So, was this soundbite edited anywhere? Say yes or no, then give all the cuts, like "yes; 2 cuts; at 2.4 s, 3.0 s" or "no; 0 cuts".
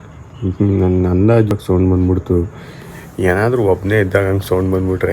yes; 1 cut; at 1.5 s